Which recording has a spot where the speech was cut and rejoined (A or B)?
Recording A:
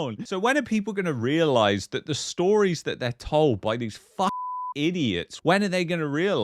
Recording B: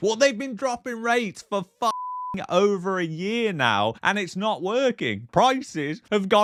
A